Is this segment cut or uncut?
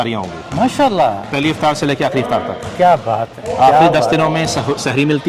uncut